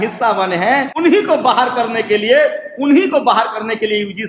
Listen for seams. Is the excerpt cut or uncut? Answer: cut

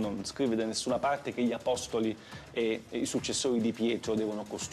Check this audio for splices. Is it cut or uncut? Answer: uncut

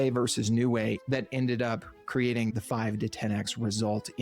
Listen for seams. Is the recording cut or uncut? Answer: cut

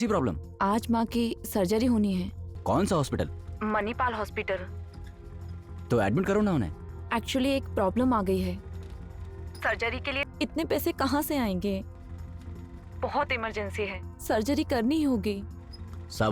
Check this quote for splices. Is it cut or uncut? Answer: cut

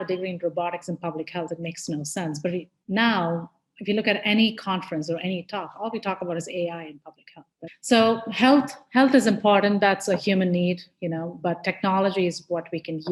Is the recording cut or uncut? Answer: cut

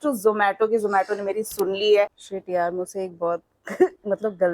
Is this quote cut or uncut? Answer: cut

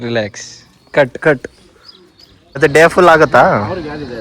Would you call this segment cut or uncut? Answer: cut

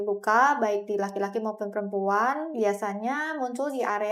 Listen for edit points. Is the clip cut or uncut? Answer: uncut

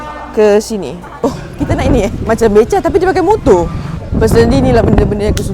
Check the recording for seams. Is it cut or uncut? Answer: cut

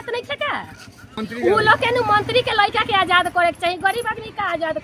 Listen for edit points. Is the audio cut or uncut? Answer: cut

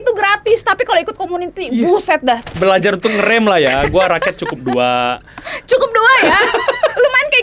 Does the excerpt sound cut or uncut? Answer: cut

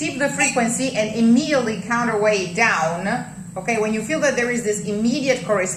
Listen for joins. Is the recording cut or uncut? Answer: uncut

